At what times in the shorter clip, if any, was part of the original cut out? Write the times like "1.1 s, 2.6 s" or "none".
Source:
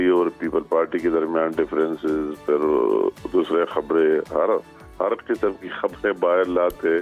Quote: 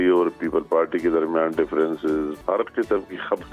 2.3 s